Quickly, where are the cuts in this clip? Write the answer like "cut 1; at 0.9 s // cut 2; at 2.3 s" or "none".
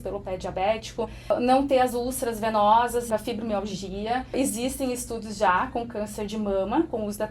cut 1; at 1.3 s // cut 2; at 3.1 s // cut 3; at 4.4 s